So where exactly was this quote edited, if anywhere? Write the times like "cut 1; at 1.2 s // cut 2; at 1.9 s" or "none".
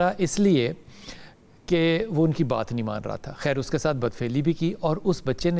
none